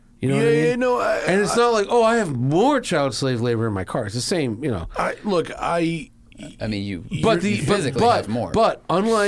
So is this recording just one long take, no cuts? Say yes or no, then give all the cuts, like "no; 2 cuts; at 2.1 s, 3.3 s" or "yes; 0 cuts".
yes; 0 cuts